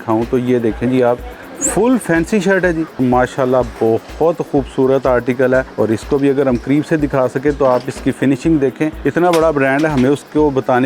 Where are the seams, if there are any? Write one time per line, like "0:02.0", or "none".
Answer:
0:03.0
0:05.7
0:09.0